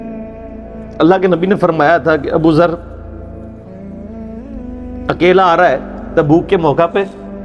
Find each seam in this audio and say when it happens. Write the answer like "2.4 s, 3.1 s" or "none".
0.9 s